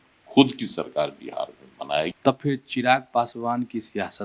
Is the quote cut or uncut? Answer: cut